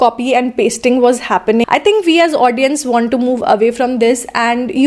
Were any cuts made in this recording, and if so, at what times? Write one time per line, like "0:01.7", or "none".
0:01.6